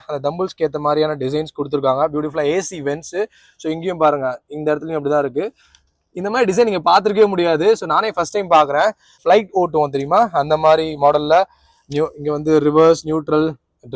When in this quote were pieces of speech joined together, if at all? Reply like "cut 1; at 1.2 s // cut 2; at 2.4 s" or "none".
cut 1; at 9.2 s